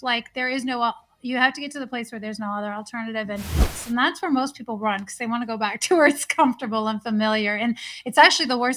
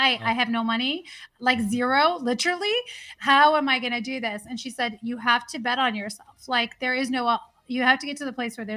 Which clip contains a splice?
first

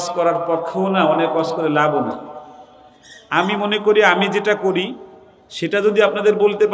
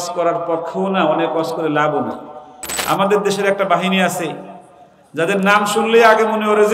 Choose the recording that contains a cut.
second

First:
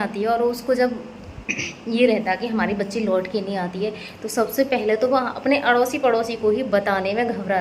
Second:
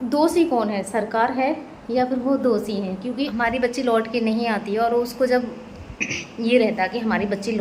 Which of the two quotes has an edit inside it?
second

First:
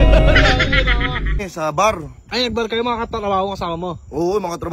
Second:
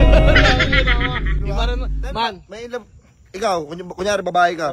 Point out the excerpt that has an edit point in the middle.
first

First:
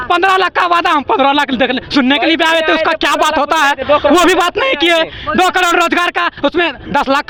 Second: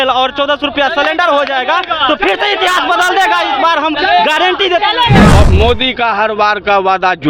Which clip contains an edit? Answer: second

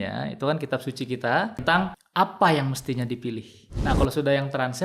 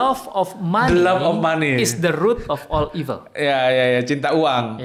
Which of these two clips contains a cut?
first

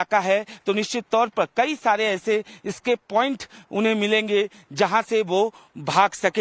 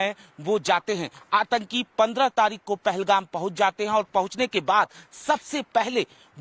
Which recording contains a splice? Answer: second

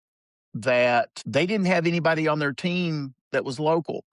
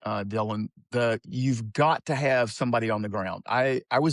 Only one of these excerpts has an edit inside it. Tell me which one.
first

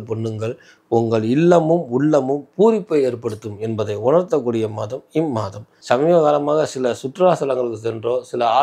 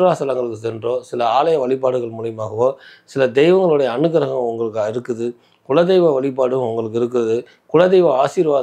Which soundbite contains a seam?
first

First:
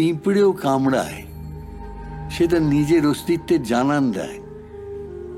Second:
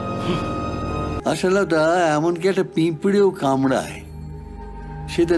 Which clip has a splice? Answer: second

